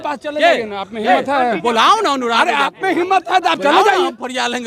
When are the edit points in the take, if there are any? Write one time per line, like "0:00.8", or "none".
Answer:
none